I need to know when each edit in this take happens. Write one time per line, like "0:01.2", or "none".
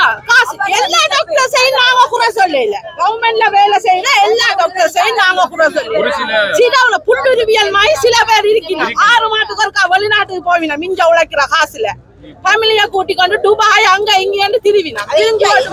none